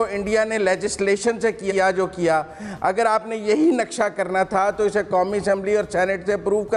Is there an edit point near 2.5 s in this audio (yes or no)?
no